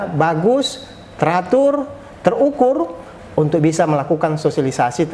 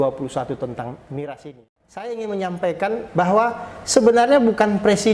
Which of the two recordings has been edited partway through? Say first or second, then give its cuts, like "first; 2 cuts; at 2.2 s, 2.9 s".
second; 1 cut; at 2.0 s